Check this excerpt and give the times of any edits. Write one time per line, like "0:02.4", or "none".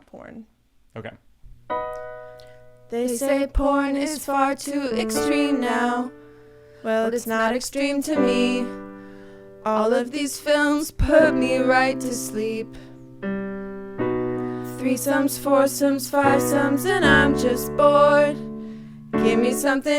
0:01.4